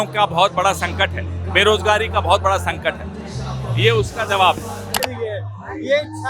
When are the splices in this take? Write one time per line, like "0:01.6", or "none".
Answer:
0:05.0